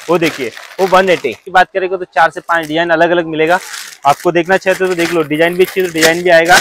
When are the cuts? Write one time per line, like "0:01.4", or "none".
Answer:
0:01.5